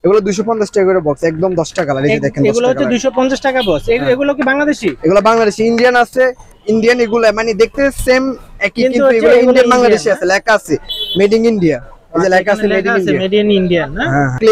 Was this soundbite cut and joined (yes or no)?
no